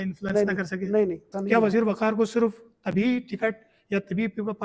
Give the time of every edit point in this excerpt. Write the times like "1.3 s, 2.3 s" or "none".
1.3 s